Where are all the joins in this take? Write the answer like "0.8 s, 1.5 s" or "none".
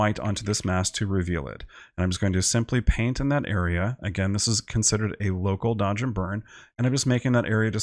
none